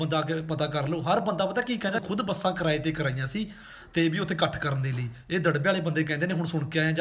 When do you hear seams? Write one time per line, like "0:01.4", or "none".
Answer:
none